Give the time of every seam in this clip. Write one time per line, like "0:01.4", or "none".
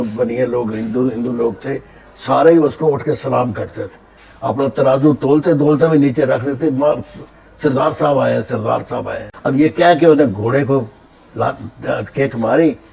0:09.3